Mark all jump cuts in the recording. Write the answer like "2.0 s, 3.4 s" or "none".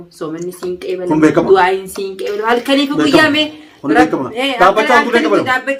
none